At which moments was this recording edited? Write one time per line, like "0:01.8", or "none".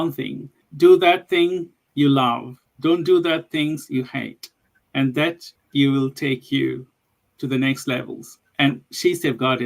0:07.1